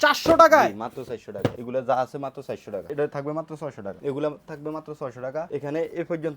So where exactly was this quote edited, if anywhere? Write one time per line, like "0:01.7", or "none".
0:01.6
0:02.8
0:04.0
0:05.5

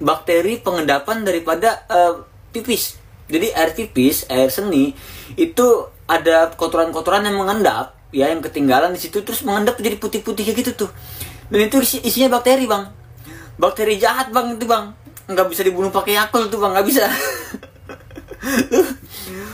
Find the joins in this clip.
0:17.2

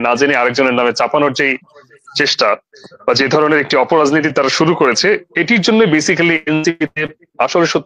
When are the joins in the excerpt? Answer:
none

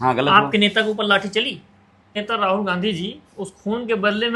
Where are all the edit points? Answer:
0:02.2

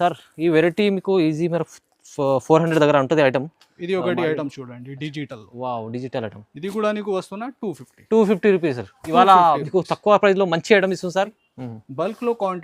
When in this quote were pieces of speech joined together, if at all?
0:11.5

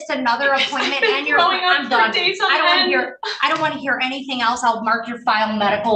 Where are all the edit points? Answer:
none

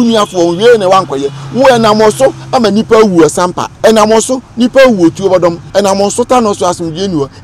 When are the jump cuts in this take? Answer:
0:03.6
0:05.6

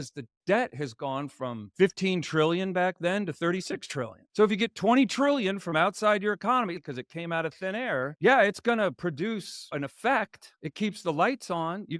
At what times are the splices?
0:06.8

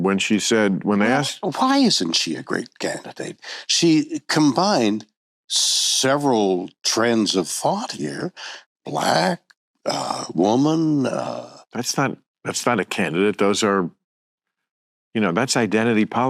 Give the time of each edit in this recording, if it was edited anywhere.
none

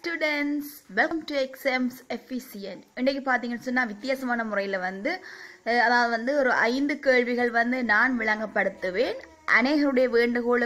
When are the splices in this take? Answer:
0:01.1

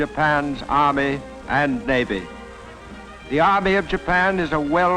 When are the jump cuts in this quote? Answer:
0:01.0

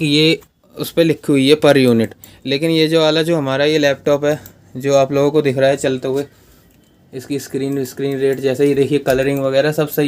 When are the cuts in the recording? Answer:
none

